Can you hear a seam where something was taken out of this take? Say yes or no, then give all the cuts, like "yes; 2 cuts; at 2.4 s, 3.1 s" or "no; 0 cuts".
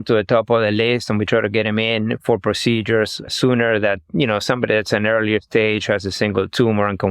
no; 0 cuts